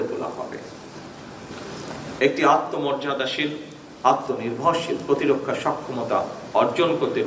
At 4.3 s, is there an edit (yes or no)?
no